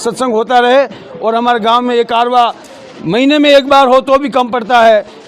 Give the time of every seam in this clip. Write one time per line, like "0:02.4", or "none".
none